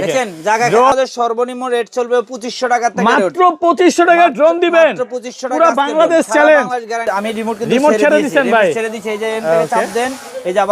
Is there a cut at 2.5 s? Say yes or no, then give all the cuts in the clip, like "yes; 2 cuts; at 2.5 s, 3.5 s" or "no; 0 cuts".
no; 2 cuts; at 0.9 s, 7.0 s